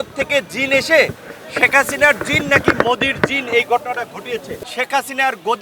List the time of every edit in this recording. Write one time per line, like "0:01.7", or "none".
0:04.5